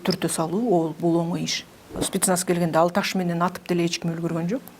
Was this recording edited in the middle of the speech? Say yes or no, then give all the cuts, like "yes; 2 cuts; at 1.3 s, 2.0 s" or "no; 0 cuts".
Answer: yes; 1 cut; at 2.0 s